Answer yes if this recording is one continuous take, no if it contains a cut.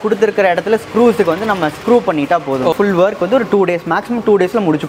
no